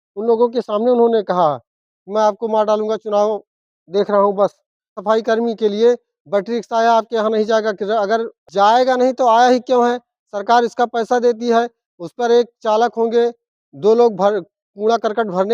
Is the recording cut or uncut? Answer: cut